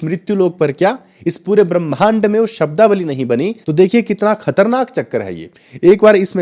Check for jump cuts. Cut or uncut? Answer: cut